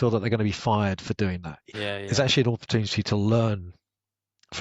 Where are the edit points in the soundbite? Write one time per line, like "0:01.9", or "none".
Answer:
0:01.7